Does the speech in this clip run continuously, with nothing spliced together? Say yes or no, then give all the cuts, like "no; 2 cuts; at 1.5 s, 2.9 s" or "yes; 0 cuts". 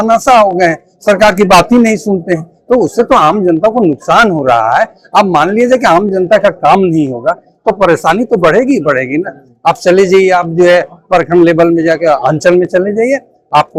yes; 0 cuts